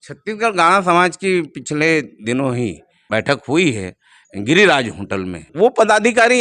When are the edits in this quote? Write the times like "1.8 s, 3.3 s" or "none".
2.9 s, 5.5 s